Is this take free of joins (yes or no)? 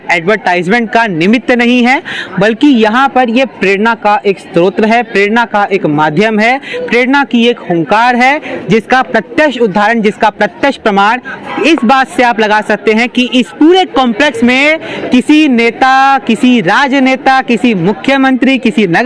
yes